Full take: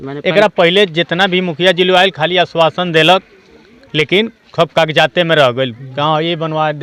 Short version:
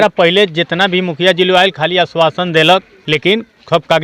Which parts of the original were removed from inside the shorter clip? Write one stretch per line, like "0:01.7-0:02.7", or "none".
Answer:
0:03.3-0:03.8